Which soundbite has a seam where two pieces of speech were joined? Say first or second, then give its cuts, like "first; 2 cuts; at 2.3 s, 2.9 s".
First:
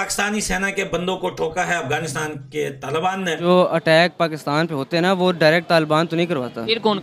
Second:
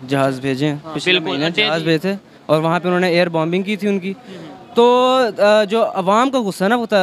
first; 1 cut; at 3.5 s